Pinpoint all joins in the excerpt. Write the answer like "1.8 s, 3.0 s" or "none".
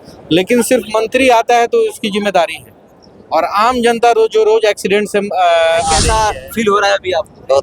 6.1 s